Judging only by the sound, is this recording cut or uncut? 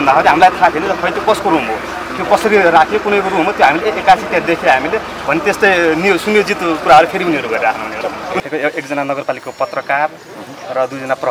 cut